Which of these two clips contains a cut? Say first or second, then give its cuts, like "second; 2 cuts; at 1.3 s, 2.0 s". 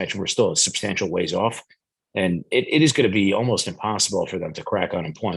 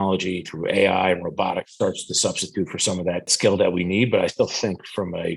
second; 1 cut; at 3.3 s